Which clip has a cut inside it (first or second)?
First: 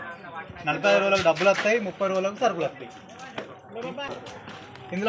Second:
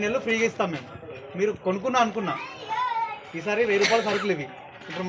first